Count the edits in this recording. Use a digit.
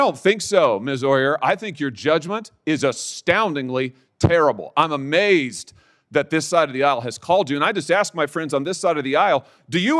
0